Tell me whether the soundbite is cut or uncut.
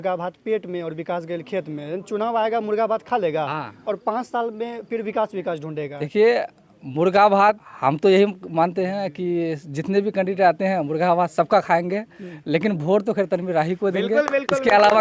cut